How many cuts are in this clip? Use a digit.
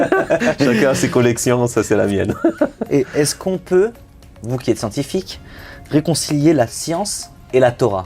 0